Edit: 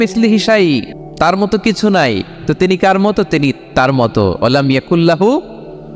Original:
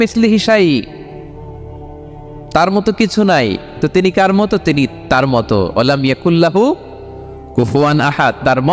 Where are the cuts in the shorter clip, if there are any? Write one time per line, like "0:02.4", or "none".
0:01.0